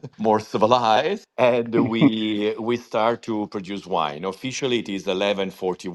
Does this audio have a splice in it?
no; 0 cuts

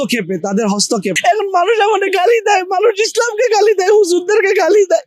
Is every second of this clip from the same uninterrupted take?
no; 1 cut; at 1.1 s

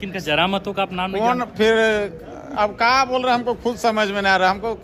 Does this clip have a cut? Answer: no; 0 cuts

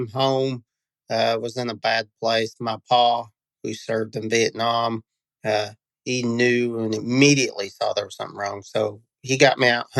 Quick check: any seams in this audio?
no; 0 cuts

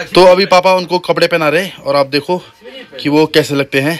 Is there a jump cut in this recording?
no; 0 cuts

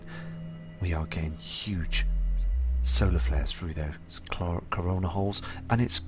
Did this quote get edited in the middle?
yes; 1 cut; at 4.5 s

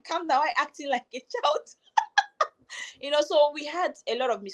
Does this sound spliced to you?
no; 0 cuts

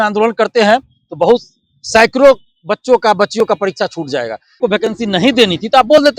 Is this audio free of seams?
no; 1 cut; at 4.6 s

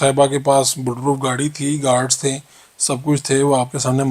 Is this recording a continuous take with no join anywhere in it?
yes; 0 cuts

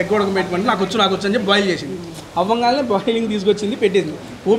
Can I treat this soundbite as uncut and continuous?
yes; 0 cuts

